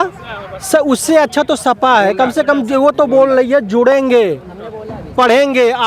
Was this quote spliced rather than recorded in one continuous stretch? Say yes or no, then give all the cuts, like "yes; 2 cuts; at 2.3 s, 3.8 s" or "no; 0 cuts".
no; 0 cuts